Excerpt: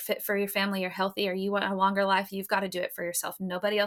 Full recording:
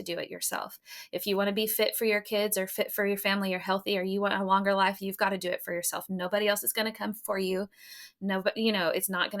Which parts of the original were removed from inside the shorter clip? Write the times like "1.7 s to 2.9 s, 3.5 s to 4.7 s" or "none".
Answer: none

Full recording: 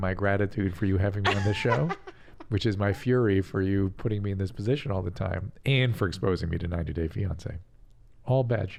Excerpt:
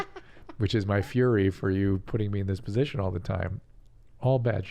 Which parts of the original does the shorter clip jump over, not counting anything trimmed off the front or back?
5.5 s to 7.7 s

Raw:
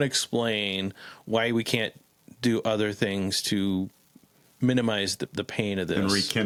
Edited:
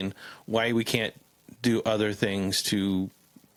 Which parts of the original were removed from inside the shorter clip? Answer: none

